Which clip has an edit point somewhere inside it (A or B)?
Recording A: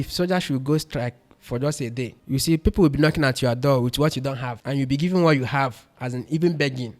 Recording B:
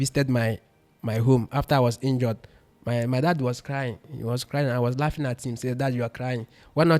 A